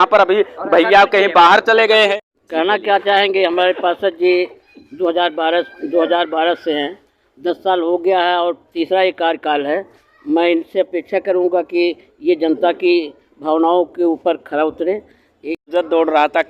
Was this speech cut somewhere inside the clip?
yes; 2 cuts; at 2.3 s, 15.7 s

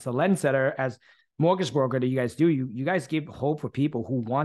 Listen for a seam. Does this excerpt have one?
no; 0 cuts

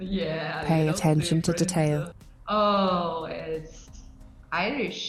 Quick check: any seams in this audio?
no; 0 cuts

